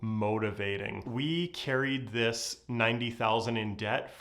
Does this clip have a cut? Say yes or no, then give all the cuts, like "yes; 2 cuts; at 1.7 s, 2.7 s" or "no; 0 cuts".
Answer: yes; 1 cut; at 1.0 s